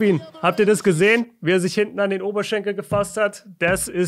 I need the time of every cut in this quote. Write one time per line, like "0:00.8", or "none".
none